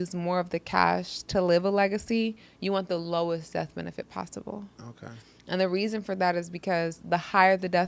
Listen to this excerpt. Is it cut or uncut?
uncut